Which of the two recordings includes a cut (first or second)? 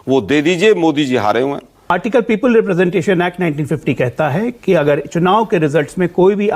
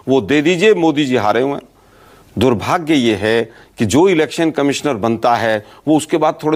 first